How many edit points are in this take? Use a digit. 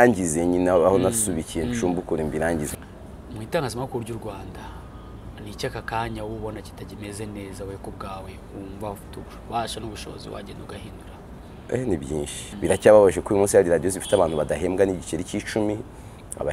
2